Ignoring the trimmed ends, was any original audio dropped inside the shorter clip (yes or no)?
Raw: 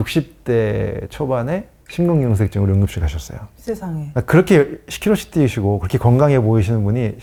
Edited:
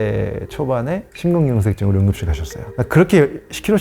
yes